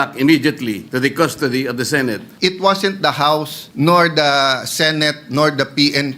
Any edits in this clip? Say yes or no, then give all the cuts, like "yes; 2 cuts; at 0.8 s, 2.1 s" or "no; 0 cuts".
yes; 3 cuts; at 0.8 s, 2.3 s, 3.6 s